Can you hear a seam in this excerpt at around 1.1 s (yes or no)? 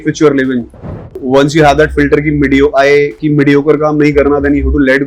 yes